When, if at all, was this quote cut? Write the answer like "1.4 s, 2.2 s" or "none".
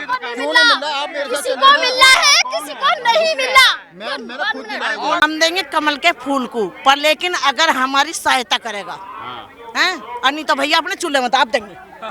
5.2 s